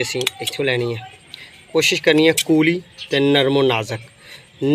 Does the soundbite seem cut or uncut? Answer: uncut